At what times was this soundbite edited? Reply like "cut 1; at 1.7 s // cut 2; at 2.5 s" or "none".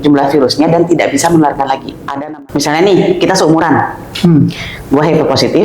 cut 1; at 2.1 s